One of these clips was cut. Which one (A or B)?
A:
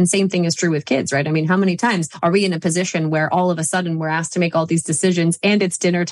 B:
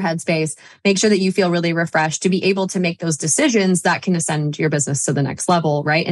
A